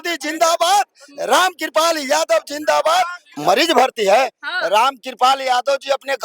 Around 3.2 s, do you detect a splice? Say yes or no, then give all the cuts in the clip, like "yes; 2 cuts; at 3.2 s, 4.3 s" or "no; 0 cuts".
yes; 1 cut; at 3.2 s